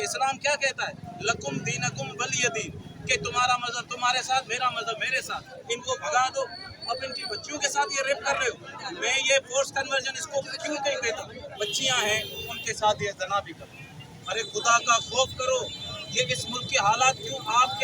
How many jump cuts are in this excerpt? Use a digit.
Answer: 2